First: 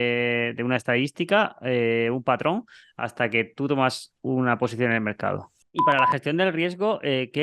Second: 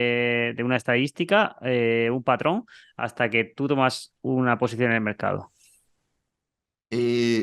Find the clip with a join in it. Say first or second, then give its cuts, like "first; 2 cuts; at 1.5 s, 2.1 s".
first; 1 cut; at 5.6 s